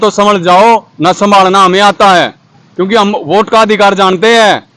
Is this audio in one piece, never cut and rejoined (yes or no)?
yes